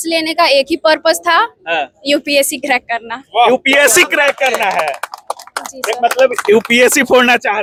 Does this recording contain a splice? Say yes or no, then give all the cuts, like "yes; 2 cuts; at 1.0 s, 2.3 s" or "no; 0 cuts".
no; 0 cuts